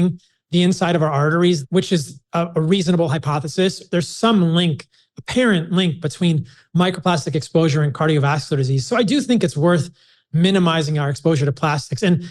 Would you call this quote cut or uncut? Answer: cut